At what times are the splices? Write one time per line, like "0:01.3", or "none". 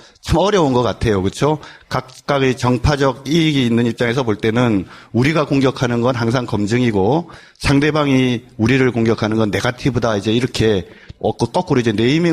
0:07.2